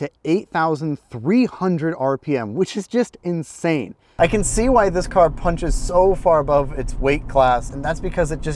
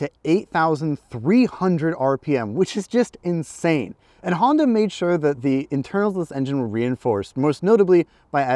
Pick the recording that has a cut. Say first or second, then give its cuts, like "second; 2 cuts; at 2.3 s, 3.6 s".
first; 2 cuts; at 4.0 s, 7.7 s